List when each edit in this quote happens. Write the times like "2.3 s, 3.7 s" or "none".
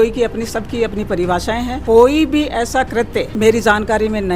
1.8 s, 3.3 s

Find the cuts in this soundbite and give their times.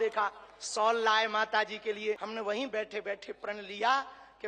2.2 s

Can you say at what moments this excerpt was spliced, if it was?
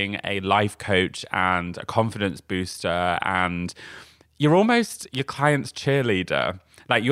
none

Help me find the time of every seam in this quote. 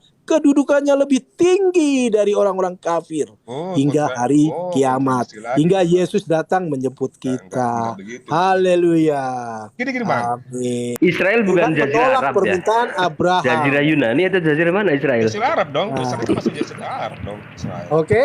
10.9 s

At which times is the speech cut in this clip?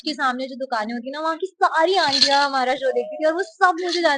none

